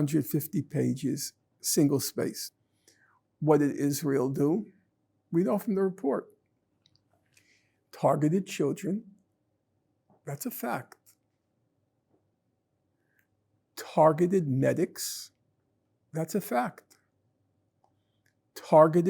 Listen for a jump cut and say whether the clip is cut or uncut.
cut